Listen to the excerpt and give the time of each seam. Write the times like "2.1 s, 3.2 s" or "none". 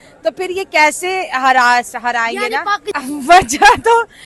3.0 s

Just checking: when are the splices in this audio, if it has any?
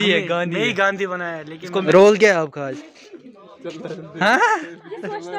1.8 s

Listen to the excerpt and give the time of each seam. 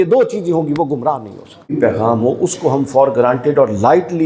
1.7 s

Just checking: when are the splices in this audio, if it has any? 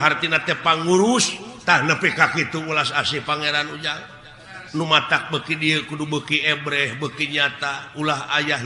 1.4 s

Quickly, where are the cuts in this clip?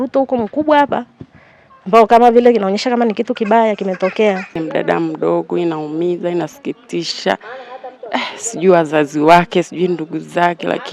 4.6 s

